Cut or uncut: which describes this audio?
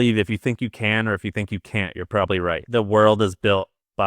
cut